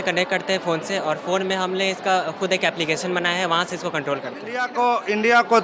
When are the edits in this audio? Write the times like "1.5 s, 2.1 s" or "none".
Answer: 4.6 s